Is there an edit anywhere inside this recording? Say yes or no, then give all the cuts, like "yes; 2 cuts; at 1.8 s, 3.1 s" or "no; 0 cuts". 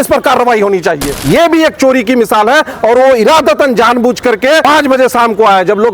yes; 2 cuts; at 1.1 s, 4.6 s